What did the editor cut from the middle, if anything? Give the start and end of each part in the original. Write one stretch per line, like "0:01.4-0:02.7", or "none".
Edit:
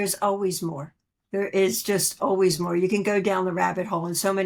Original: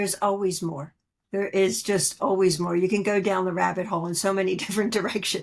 none